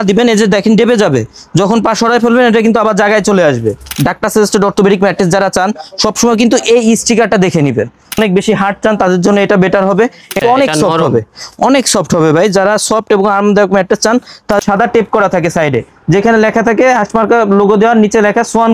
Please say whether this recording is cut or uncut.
cut